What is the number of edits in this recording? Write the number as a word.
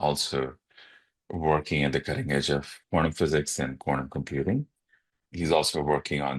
two